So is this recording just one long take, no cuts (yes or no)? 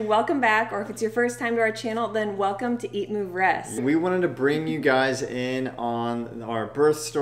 no